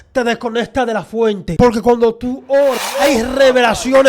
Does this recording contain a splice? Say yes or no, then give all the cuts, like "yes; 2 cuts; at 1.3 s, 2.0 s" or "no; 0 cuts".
yes; 2 cuts; at 1.5 s, 2.8 s